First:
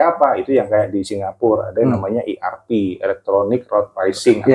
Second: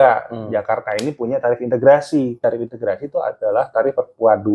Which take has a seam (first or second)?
second